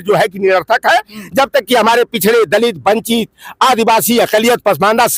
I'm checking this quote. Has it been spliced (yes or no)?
no